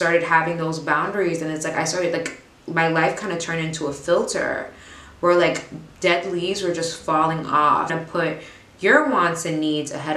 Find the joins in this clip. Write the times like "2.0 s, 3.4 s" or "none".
7.9 s

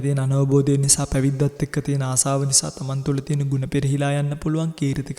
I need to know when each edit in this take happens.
none

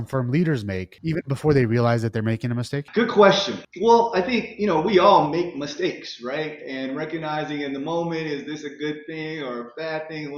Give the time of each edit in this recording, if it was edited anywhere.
0.9 s, 2.8 s, 3.6 s

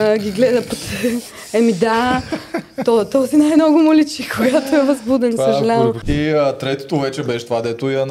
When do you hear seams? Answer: 6.0 s

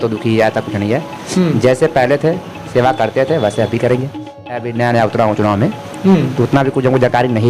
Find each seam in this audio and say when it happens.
4.6 s

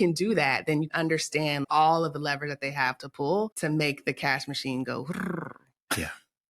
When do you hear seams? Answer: 0.9 s

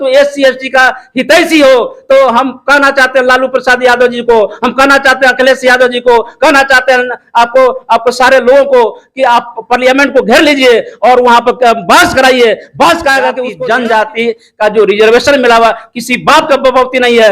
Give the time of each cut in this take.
13.5 s

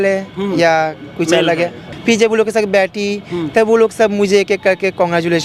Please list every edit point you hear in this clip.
1.9 s

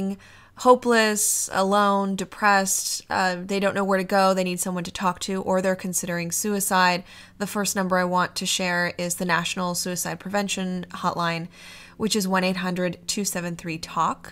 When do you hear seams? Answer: 1.4 s

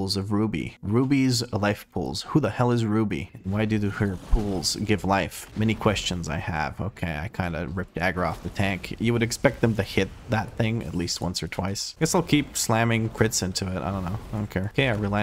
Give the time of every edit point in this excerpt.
none

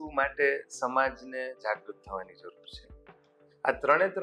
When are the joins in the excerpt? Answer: none

